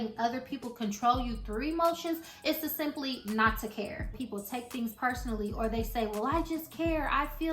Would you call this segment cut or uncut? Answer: cut